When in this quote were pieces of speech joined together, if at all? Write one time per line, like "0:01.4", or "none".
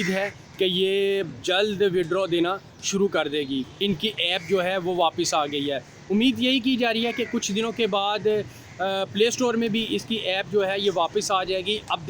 0:03.7